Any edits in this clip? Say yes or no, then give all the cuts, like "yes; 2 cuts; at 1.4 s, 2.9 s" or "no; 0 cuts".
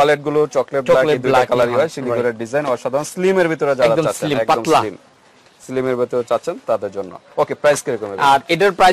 no; 0 cuts